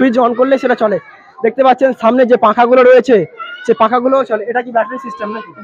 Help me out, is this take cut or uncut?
uncut